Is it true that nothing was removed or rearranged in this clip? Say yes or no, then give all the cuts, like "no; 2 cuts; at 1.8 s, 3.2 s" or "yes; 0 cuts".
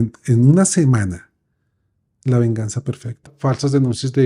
no; 1 cut; at 3.3 s